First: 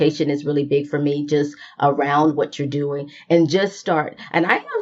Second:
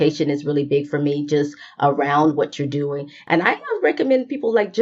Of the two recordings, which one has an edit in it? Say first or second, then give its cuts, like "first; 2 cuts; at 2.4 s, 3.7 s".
second; 1 cut; at 3.1 s